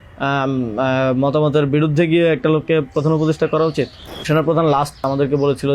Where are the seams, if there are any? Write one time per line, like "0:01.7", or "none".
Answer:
0:04.2
0:05.0